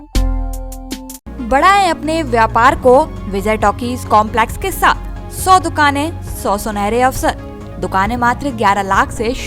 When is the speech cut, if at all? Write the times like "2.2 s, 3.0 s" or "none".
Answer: none